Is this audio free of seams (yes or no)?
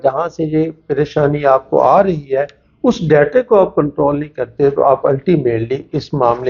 yes